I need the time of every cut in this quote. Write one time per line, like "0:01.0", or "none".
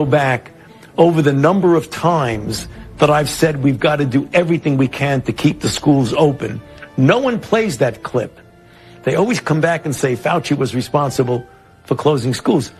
none